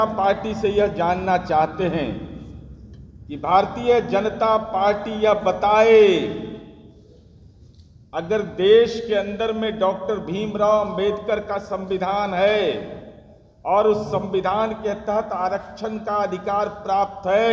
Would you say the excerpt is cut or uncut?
uncut